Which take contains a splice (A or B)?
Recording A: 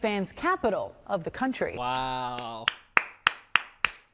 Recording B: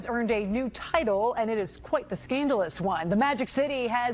A